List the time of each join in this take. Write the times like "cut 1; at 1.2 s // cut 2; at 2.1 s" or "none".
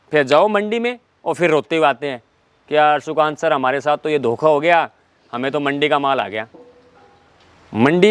cut 1; at 7.0 s

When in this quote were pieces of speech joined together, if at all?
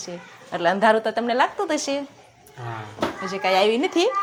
none

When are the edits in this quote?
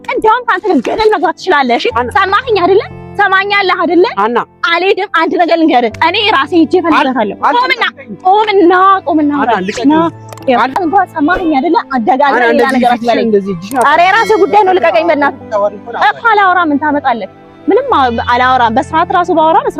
cut 1; at 10.7 s

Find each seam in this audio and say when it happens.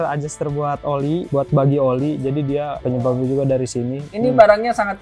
cut 1; at 1.3 s // cut 2; at 2.8 s // cut 3; at 4.0 s

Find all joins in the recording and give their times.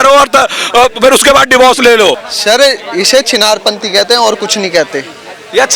cut 1; at 2.3 s

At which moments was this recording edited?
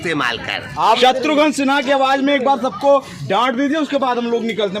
cut 1; at 1.0 s

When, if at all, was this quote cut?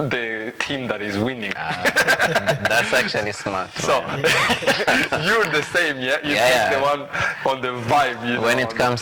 none

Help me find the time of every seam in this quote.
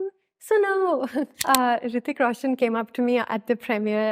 cut 1; at 1.4 s

